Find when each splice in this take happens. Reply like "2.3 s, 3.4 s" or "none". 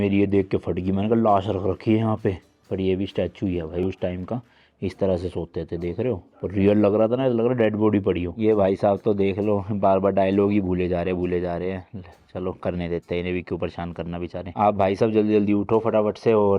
none